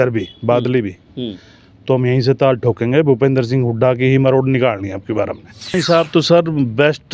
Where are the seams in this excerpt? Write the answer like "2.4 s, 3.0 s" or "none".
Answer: 5.7 s